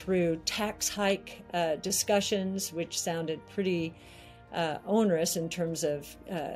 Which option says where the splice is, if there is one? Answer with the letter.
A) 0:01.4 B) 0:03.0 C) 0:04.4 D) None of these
D